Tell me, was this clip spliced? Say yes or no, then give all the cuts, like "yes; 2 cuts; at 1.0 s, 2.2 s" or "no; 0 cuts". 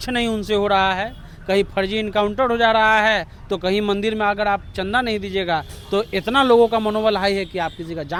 no; 0 cuts